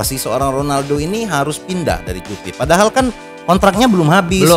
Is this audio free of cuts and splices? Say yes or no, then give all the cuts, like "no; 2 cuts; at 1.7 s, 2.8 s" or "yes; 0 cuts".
yes; 0 cuts